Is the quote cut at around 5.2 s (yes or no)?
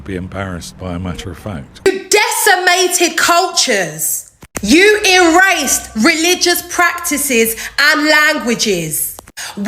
no